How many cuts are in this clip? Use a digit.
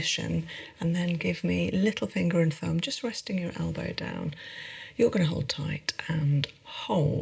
0